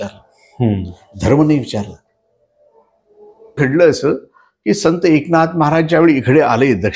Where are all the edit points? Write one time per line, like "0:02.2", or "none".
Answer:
0:03.6